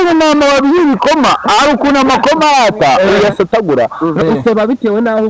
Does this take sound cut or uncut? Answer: cut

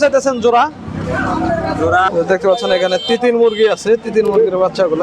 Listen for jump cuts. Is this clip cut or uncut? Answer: cut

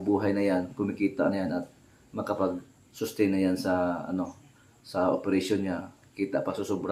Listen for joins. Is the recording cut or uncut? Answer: uncut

